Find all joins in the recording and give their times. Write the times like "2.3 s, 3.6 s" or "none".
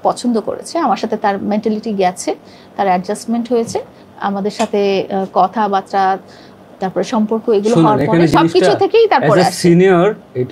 none